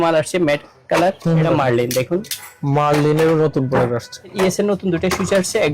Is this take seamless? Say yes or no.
no